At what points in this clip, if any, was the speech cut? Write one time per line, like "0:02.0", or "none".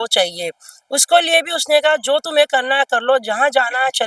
none